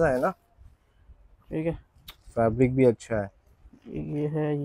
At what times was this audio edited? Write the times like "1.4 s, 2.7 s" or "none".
none